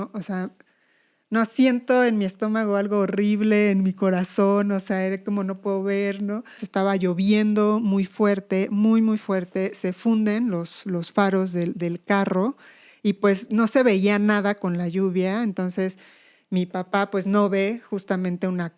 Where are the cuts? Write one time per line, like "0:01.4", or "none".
0:06.6